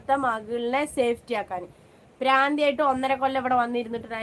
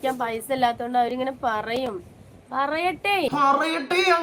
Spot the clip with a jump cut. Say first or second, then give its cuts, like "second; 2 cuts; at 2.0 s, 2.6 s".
second; 1 cut; at 3.3 s